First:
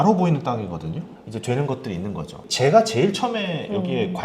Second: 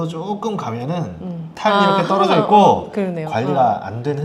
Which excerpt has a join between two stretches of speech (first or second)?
first